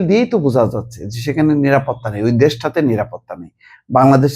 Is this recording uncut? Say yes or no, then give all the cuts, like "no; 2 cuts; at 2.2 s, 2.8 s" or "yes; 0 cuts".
yes; 0 cuts